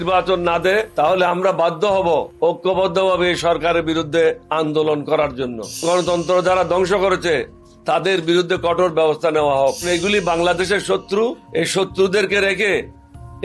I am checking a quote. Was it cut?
yes; 6 cuts; at 0.9 s, 2.3 s, 4.4 s, 5.8 s, 9.9 s, 11.4 s

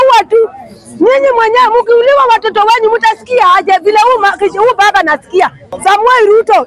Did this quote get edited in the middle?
yes; 1 cut; at 5.7 s

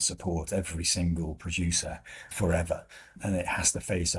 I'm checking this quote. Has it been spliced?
no; 0 cuts

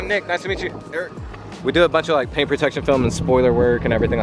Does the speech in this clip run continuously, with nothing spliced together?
no; 1 cut; at 1.5 s

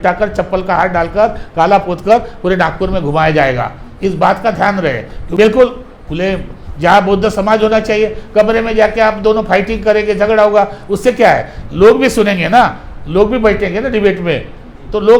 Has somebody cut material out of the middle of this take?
yes; 1 cut; at 5.4 s

